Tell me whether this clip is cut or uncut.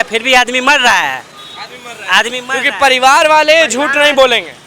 uncut